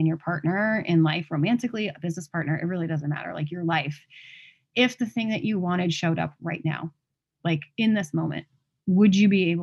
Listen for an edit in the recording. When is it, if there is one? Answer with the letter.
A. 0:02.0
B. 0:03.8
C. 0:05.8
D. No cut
D